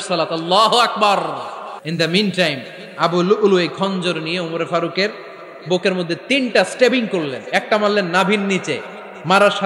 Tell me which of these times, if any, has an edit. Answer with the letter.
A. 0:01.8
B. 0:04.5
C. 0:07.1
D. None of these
A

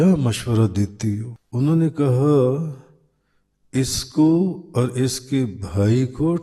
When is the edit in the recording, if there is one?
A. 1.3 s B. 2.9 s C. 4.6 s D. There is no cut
A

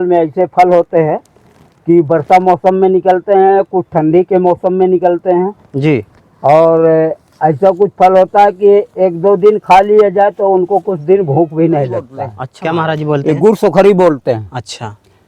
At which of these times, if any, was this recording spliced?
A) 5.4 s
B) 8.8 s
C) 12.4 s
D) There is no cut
C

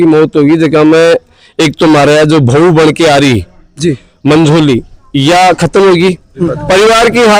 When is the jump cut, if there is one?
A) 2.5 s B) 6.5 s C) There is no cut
B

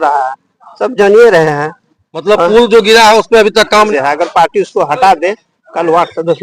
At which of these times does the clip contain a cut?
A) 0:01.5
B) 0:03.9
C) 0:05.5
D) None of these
B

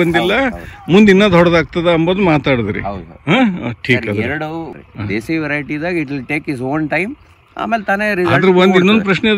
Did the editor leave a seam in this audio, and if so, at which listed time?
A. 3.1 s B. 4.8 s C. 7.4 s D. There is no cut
B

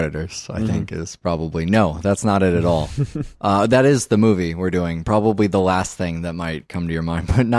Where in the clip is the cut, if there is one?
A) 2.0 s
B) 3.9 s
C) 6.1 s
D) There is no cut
A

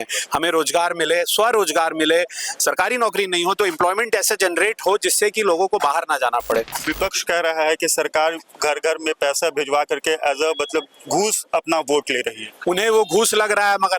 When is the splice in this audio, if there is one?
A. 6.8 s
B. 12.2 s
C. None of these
A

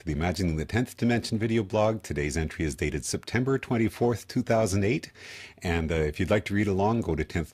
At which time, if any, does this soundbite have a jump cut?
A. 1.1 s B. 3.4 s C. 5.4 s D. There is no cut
A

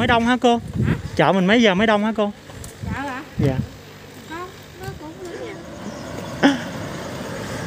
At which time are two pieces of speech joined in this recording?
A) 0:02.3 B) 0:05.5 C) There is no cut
B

